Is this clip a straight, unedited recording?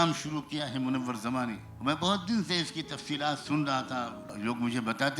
no; 2 cuts; at 1.7 s, 4.2 s

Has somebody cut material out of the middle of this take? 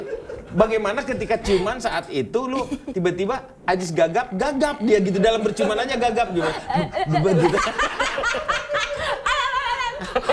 no; 0 cuts

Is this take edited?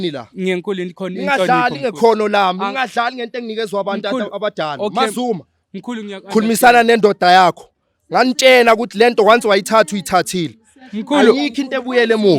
no; 0 cuts

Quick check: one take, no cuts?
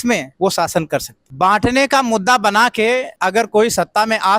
no; 2 cuts; at 1.2 s, 3.1 s

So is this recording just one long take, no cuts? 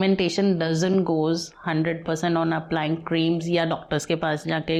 yes; 0 cuts

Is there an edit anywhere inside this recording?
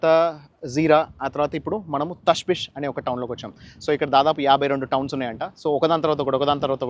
no; 0 cuts

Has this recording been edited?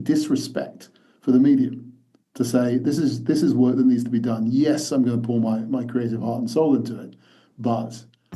no; 0 cuts

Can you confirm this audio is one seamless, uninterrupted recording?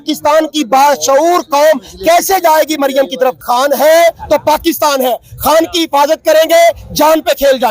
no; 1 cut; at 3.4 s

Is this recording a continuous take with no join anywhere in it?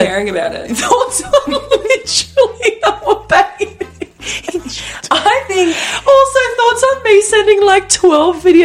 yes; 0 cuts

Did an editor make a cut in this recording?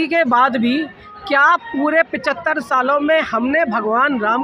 no; 0 cuts

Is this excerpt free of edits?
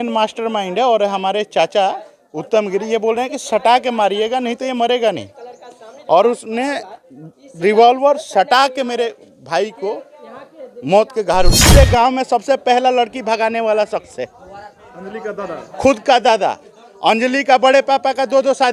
no; 1 cut; at 11.7 s

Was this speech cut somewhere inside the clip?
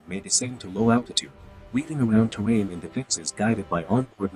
no; 0 cuts

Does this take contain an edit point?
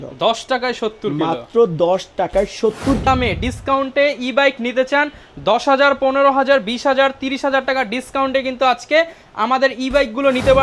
yes; 1 cut; at 3.1 s

